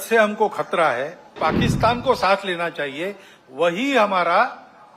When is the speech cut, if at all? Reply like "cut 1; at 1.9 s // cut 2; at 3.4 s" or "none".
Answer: cut 1; at 1.4 s